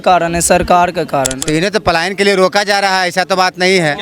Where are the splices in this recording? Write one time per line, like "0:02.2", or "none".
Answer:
0:01.3